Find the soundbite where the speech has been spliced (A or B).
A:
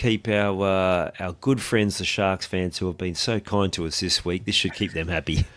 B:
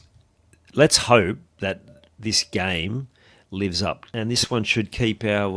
B